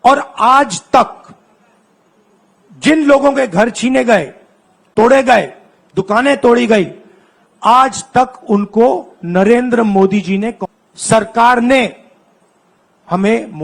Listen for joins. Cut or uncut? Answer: cut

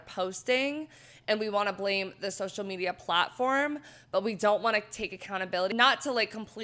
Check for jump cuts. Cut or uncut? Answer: cut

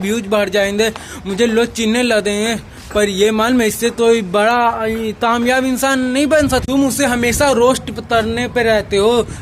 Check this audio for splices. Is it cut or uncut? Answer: cut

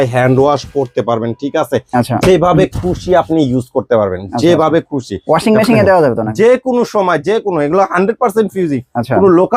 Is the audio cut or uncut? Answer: uncut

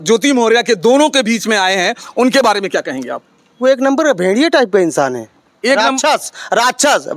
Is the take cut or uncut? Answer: uncut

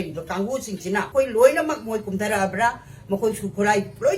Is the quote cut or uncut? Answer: cut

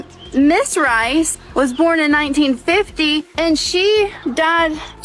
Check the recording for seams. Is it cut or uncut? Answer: cut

